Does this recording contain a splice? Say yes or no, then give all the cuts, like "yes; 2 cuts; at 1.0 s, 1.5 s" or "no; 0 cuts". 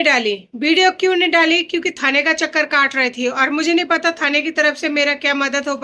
no; 0 cuts